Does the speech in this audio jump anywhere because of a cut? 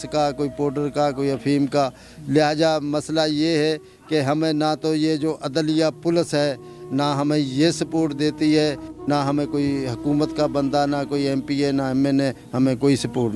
no; 0 cuts

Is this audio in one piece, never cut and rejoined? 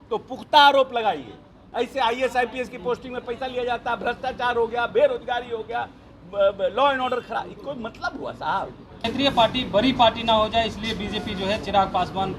no; 2 cuts; at 1.6 s, 9.0 s

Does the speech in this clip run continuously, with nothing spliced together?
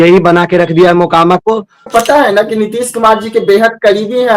no; 1 cut; at 1.8 s

